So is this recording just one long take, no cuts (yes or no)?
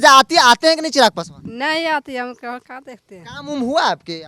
yes